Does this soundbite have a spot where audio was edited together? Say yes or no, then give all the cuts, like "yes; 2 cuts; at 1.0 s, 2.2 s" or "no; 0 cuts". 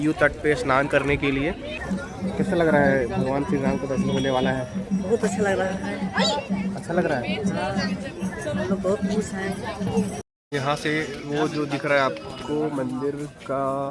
yes; 2 cuts; at 1.8 s, 10.2 s